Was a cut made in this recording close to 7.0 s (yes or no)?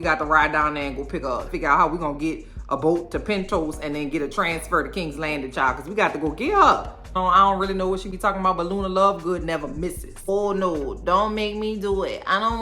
yes